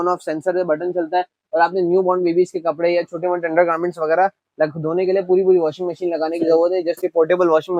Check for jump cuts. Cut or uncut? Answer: uncut